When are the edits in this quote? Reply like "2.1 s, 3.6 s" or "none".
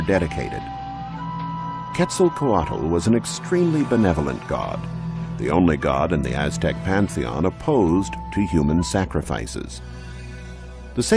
2.3 s